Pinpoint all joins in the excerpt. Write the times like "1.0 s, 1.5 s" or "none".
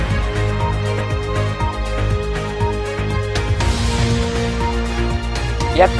3.5 s